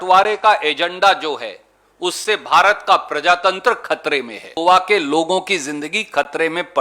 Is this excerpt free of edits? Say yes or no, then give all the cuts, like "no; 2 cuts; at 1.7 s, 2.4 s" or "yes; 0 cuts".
no; 1 cut; at 4.5 s